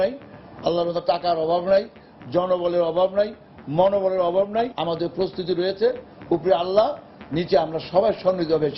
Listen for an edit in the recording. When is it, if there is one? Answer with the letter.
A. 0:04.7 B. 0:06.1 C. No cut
A